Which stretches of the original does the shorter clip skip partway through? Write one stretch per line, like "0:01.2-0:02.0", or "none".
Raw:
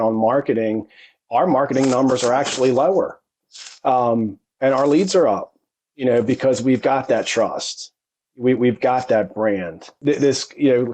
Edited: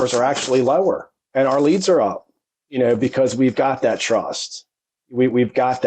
0:03.3-0:04.4